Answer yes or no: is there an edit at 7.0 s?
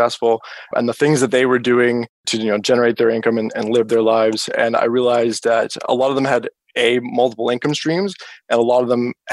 no